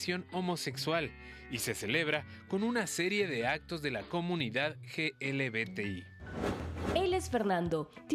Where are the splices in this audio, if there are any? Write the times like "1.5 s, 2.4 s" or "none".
6.7 s